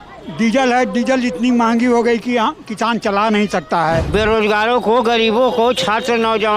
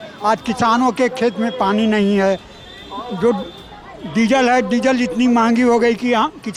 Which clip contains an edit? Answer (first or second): first